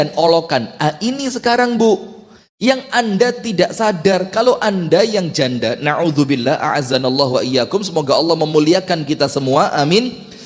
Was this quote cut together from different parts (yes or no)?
no